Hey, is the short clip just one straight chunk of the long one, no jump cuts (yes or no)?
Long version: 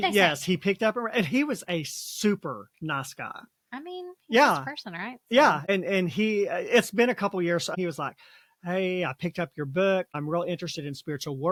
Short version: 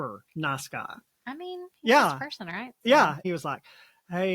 no